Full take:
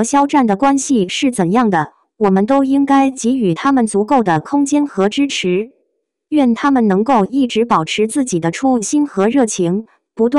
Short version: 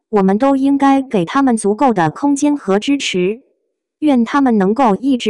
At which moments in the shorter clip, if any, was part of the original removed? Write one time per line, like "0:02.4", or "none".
0:01.2

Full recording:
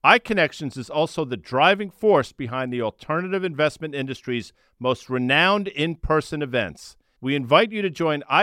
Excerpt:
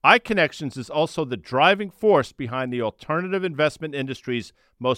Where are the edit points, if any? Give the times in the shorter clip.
none

